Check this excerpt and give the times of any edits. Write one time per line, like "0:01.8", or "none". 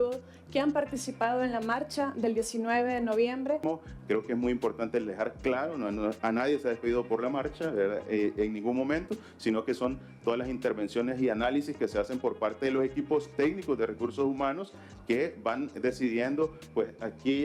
0:03.6